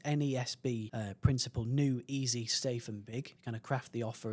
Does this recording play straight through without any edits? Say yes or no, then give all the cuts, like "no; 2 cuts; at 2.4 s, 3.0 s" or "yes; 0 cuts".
no; 2 cuts; at 0.9 s, 3.4 s